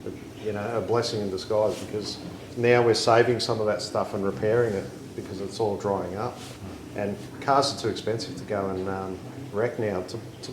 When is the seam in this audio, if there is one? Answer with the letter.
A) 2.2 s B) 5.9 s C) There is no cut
A